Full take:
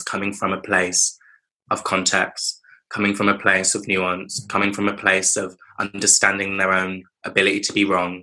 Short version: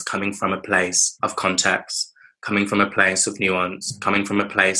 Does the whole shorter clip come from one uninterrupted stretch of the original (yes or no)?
no